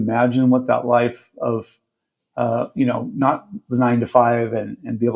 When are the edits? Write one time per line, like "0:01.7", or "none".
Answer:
none